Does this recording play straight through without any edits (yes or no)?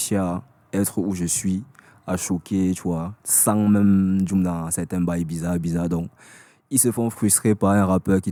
yes